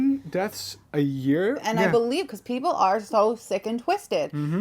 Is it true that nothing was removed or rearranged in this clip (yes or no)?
no